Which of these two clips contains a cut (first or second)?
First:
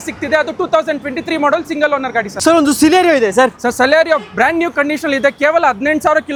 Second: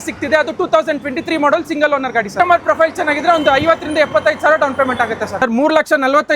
second